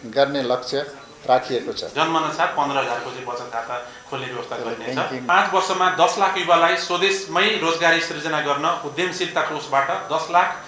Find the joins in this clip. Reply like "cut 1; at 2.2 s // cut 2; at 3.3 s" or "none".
cut 1; at 1.8 s // cut 2; at 5.3 s